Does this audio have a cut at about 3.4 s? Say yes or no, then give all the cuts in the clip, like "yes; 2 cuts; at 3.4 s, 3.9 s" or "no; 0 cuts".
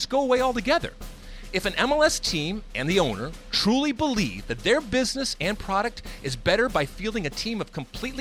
no; 0 cuts